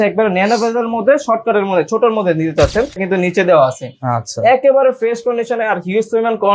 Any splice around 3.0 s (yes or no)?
yes